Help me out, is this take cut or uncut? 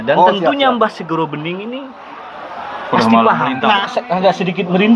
cut